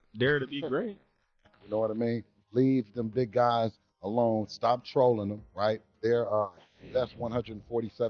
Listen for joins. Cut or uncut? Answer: cut